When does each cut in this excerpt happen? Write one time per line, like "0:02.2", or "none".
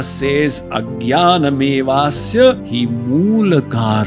0:02.7